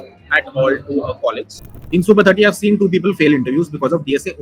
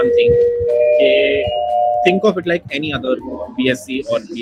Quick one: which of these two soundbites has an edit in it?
first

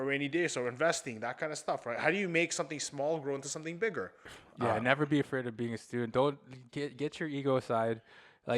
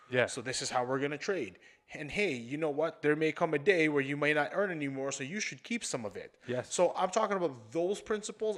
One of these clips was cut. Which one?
first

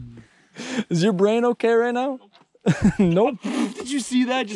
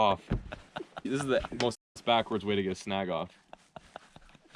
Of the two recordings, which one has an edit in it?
second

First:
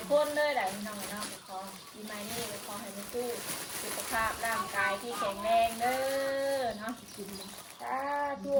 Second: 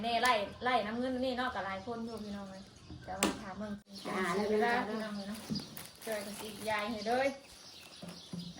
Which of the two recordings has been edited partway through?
second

